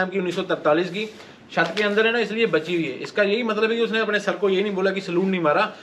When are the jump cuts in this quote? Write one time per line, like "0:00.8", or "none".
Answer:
none